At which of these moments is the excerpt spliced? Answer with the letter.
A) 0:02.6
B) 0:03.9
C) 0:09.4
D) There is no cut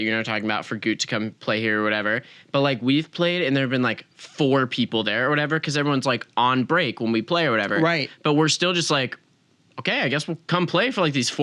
D